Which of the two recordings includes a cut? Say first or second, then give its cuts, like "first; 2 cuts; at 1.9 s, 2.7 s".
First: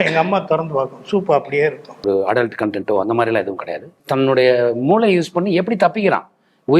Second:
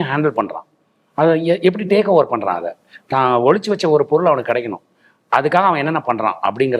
first; 2 cuts; at 2.0 s, 4.0 s